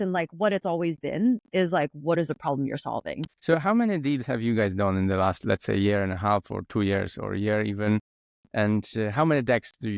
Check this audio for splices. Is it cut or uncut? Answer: cut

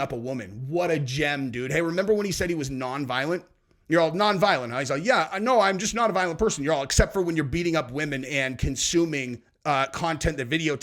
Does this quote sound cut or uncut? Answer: uncut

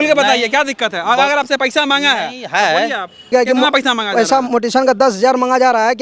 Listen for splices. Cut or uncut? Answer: cut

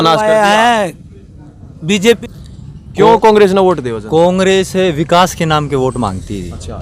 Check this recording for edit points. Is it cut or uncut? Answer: cut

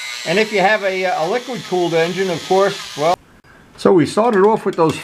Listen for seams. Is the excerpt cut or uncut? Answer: cut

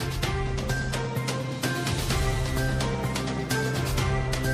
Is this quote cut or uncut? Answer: uncut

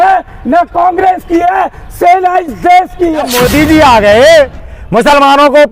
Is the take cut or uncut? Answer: cut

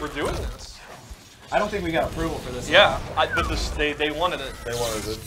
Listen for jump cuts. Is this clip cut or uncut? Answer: uncut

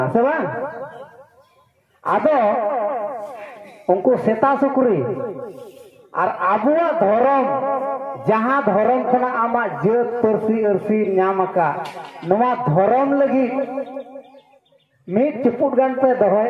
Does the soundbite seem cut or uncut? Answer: uncut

